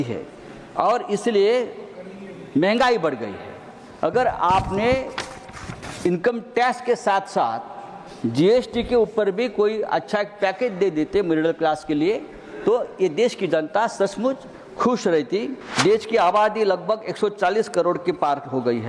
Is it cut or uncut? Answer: cut